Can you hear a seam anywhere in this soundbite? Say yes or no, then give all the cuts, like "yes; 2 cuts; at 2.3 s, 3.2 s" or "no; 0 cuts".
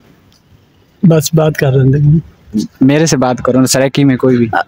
no; 0 cuts